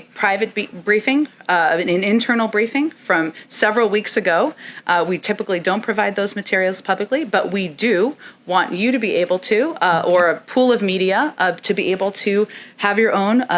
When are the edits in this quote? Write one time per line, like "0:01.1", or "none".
none